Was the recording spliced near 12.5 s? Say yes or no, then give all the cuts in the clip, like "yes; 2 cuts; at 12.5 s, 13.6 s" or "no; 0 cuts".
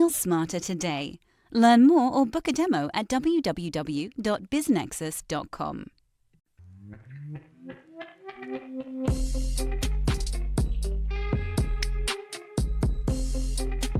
no; 1 cut; at 6.4 s